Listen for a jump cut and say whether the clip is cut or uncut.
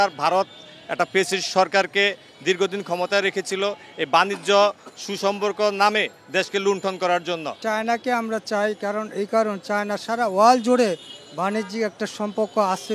uncut